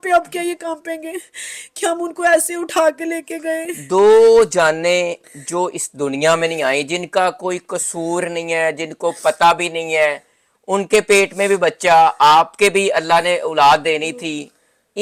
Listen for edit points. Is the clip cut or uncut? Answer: uncut